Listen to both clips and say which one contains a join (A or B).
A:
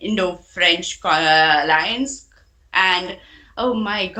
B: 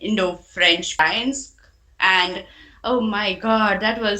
B